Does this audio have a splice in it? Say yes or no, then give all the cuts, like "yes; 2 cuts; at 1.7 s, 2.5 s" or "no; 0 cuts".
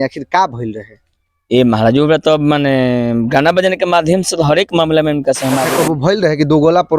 yes; 1 cut; at 5.7 s